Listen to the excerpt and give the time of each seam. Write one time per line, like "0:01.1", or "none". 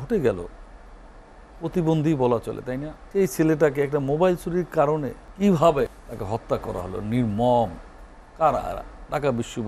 0:02.9
0:05.2
0:05.9